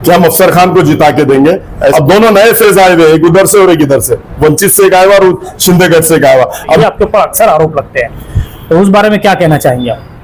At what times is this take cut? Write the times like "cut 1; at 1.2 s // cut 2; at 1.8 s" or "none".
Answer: cut 1; at 1.9 s // cut 2; at 6.8 s